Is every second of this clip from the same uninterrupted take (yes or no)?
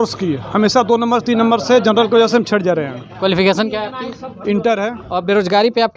no